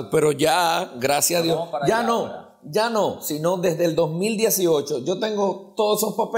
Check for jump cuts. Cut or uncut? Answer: uncut